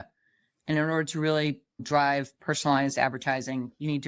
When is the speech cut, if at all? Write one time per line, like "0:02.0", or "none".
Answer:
0:01.8